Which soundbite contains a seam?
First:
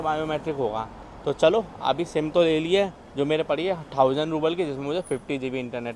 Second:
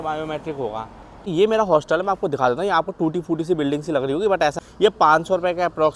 second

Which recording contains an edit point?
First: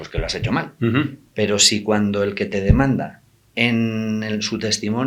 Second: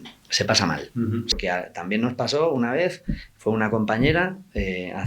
second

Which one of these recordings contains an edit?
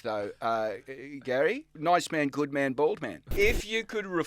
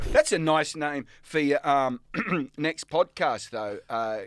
first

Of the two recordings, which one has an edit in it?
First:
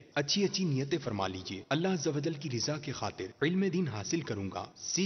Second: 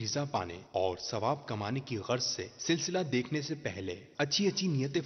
second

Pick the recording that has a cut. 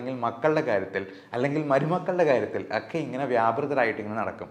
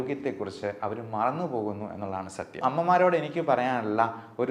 second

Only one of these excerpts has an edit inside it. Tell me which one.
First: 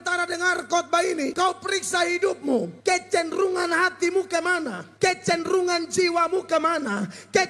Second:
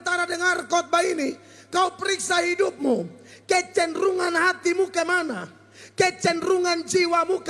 first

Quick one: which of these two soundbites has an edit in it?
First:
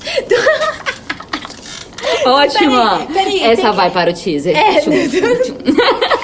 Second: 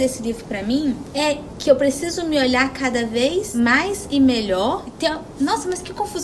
second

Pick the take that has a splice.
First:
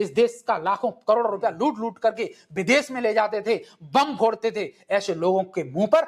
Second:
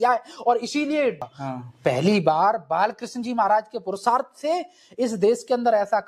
second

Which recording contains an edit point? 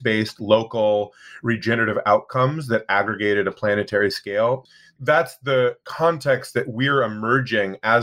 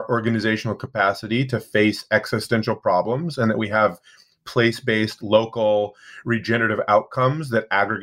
first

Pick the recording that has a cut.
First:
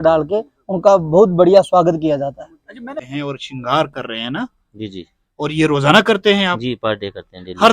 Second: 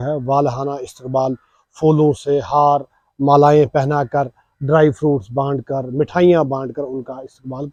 first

